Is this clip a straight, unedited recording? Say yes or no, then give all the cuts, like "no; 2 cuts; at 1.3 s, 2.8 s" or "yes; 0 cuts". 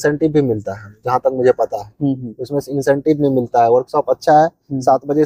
yes; 0 cuts